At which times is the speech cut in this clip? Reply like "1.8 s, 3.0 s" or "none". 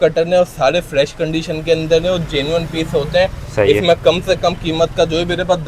none